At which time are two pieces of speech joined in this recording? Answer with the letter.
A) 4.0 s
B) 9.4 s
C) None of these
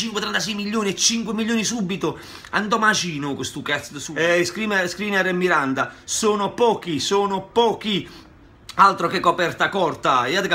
A